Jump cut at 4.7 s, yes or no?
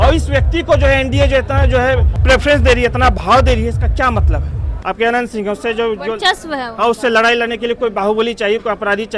yes